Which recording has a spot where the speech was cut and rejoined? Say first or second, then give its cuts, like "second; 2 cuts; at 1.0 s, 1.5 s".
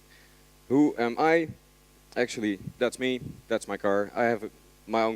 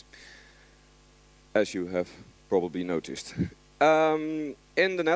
first; 1 cut; at 3.3 s